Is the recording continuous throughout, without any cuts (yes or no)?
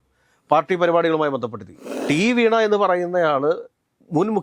no